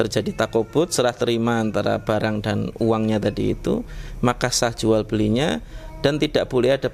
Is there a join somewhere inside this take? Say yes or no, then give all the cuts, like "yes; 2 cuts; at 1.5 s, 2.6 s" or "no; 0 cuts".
no; 0 cuts